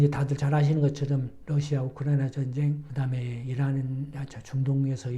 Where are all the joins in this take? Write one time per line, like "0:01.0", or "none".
0:01.3